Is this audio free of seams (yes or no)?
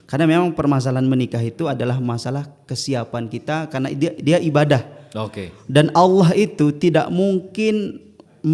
yes